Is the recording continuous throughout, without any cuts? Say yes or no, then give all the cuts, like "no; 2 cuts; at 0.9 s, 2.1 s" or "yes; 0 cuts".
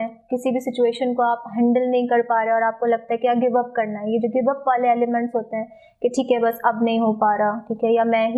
yes; 0 cuts